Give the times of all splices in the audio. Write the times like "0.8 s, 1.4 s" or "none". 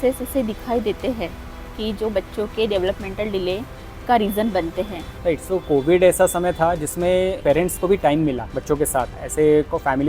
5.0 s, 7.4 s, 8.9 s